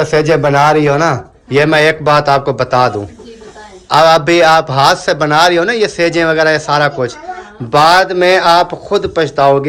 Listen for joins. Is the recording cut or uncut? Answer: uncut